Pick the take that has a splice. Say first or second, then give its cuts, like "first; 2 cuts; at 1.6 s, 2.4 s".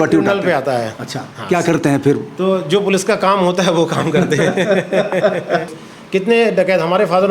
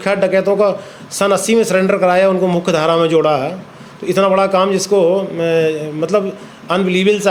first; 1 cut; at 5.7 s